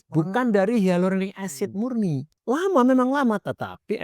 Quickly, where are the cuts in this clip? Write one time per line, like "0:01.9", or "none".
0:02.3